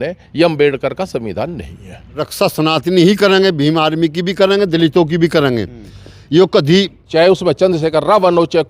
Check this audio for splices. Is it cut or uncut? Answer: cut